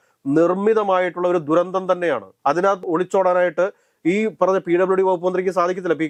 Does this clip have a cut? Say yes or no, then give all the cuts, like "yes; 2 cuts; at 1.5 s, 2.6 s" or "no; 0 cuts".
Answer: no; 0 cuts